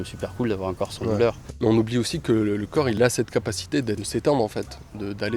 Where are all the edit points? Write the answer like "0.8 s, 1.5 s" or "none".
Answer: 1.4 s, 3.0 s, 4.0 s